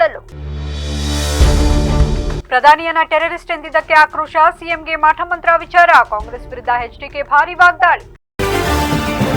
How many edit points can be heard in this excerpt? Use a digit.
1